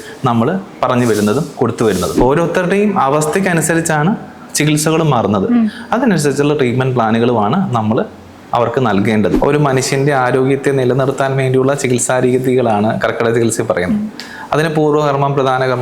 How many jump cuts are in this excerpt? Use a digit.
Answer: 2